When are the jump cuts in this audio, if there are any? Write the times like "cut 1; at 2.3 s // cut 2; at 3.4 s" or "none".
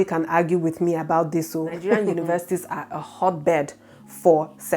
cut 1; at 1.9 s